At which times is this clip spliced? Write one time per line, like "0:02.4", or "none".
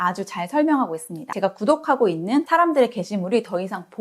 0:01.2
0:02.5